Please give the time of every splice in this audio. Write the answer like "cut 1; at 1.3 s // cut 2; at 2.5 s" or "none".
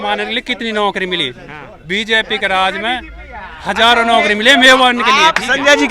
none

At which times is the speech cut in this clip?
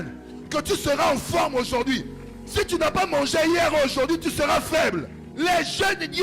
cut 1; at 5.2 s

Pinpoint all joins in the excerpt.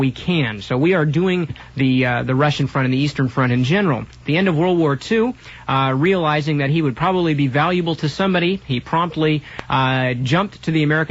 none

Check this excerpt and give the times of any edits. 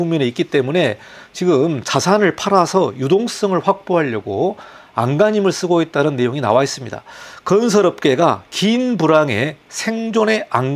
none

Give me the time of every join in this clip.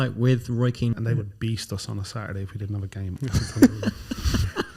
cut 1; at 1.0 s // cut 2; at 3.1 s

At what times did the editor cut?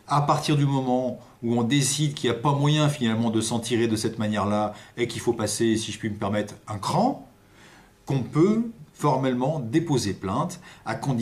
cut 1; at 5.2 s

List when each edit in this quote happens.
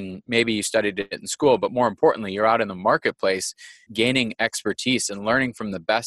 cut 1; at 3.9 s

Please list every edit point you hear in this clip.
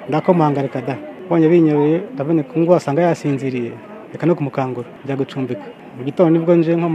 cut 1; at 1.1 s // cut 2; at 4.9 s // cut 3; at 5.8 s

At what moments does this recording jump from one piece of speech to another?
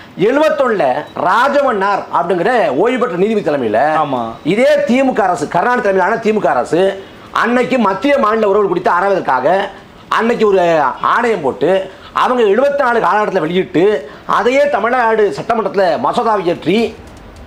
none

